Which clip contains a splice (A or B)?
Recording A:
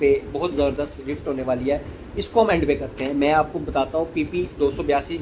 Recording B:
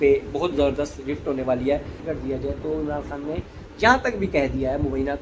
B